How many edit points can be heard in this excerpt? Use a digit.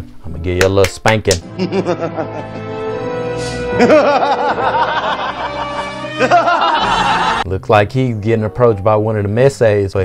1